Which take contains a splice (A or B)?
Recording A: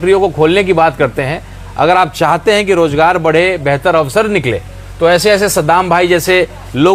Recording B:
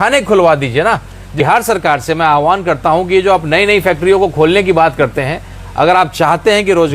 B